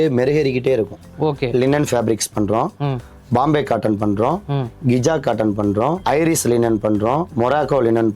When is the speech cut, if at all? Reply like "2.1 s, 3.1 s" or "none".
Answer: 1.0 s